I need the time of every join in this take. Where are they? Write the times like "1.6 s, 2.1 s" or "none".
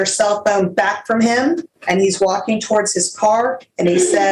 1.7 s

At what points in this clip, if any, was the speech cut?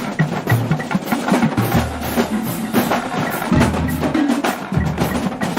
none

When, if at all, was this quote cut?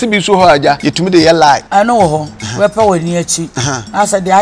0.9 s, 1.6 s, 2.4 s

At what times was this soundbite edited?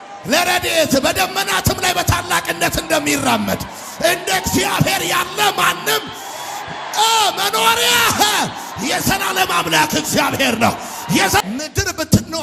11.4 s

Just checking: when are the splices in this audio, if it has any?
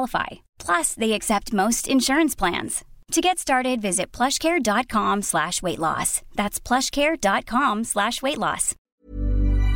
8.9 s

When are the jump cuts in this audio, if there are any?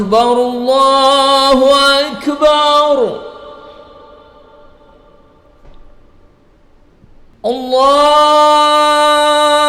7.3 s

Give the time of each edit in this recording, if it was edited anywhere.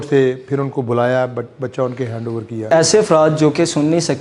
2.7 s

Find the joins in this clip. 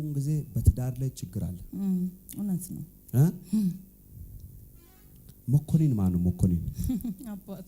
none

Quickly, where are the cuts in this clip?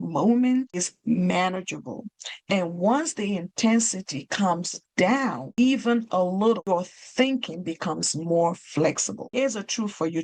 0.9 s, 5.4 s, 6.7 s, 9.3 s

